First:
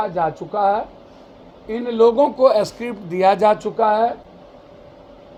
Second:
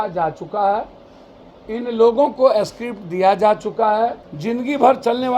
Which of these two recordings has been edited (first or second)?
second